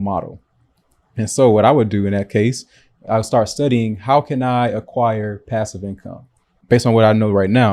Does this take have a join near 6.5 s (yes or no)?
yes